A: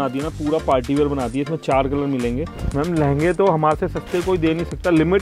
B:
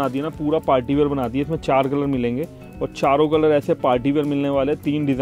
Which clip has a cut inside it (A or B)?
A